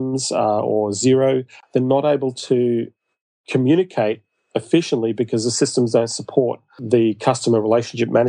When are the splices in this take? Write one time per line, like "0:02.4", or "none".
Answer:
0:01.5
0:06.8